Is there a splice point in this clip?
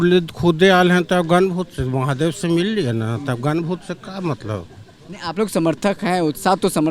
no; 0 cuts

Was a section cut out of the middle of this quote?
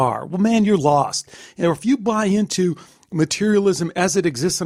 no; 0 cuts

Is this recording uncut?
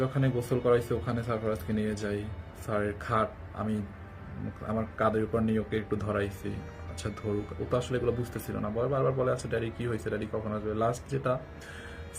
yes; 0 cuts

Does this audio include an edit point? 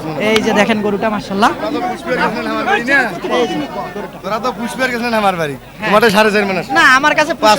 no; 0 cuts

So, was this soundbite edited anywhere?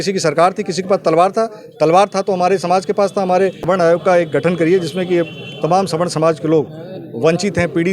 yes; 1 cut; at 3.6 s

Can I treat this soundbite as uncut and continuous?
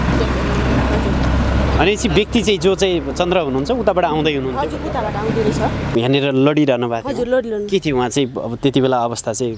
no; 1 cut; at 5.9 s

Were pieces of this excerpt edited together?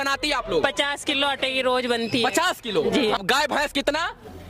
yes; 1 cut; at 3.2 s

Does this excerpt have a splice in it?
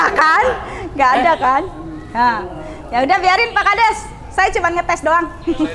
no; 0 cuts

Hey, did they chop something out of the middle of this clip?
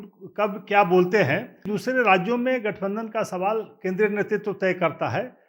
yes; 1 cut; at 1.7 s

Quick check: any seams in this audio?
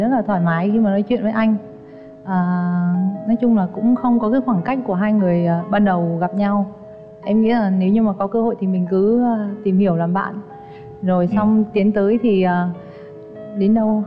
no; 0 cuts

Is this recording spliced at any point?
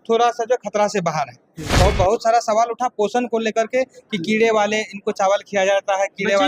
yes; 1 cut; at 1.7 s

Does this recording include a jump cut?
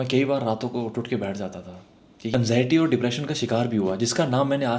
yes; 1 cut; at 2.3 s

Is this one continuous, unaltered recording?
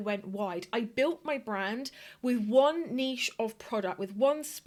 yes; 0 cuts

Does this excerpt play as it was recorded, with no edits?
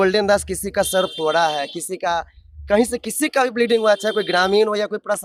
yes; 0 cuts

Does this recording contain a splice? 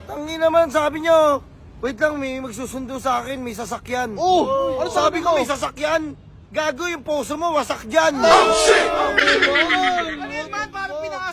no; 0 cuts

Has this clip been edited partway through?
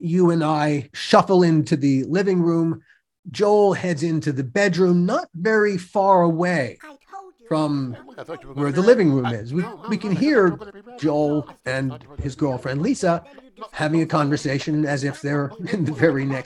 yes; 1 cut; at 0.9 s

